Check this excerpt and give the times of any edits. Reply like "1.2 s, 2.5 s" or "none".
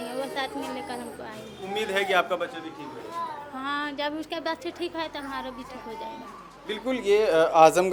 none